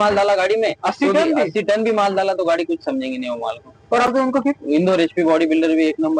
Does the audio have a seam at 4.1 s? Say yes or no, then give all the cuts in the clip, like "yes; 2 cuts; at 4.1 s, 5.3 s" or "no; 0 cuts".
yes; 1 cut; at 4.1 s